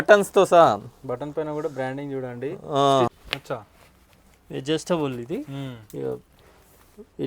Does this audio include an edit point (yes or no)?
yes